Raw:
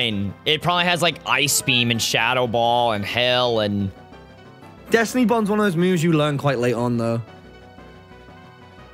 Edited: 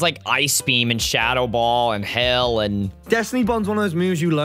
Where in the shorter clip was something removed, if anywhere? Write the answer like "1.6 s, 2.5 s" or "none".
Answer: 2.9 s